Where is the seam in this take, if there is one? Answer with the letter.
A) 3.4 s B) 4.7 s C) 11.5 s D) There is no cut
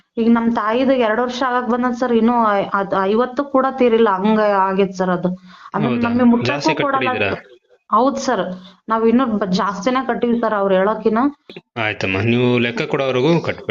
C